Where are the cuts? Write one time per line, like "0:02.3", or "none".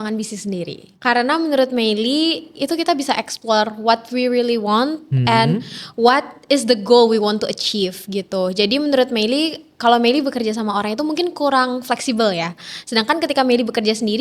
none

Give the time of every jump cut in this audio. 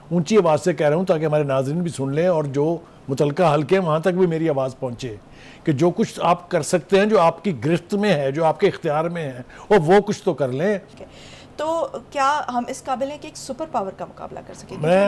0:11.0

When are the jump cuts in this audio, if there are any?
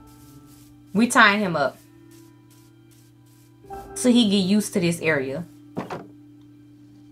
0:05.6

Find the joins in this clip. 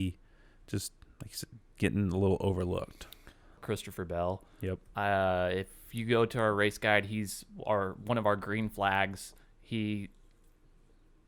0:03.6

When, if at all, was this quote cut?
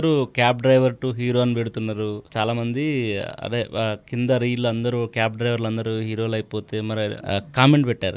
0:07.2

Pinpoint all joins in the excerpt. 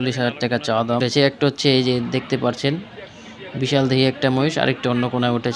0:01.0

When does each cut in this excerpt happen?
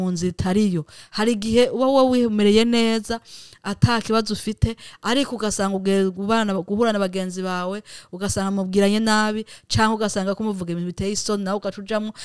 none

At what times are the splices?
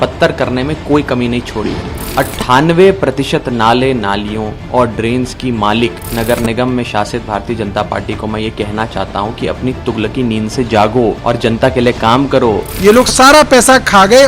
0:12.7

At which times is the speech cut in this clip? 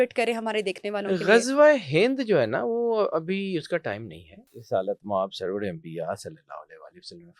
0:04.6

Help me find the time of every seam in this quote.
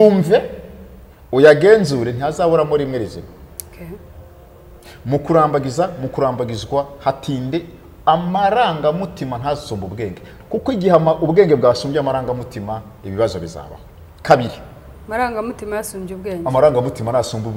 none

